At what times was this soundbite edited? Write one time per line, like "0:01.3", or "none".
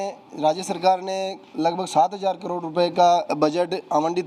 none

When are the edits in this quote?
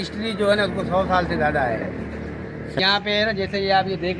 0:02.8

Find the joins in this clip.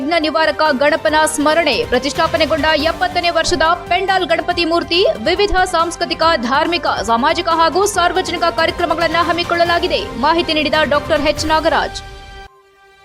none

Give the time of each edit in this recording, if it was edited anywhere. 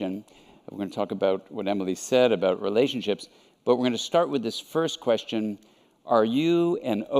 0:05.7

